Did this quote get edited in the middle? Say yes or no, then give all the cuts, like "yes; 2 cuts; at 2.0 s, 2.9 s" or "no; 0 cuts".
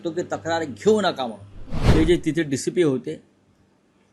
yes; 1 cut; at 1.8 s